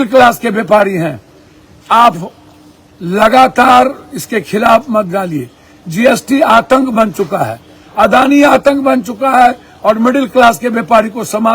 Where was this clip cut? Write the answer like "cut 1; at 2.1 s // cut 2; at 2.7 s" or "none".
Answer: none